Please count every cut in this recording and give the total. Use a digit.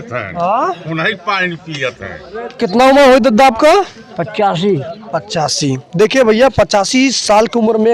0